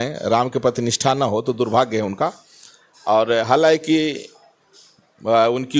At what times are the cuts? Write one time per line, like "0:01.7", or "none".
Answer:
none